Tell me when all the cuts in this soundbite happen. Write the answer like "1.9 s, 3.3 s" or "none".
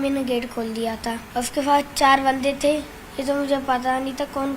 1.2 s, 3.0 s